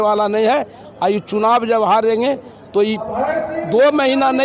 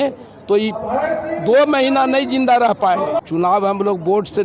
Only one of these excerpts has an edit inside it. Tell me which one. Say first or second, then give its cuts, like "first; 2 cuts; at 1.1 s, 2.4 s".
second; 1 cut; at 3.2 s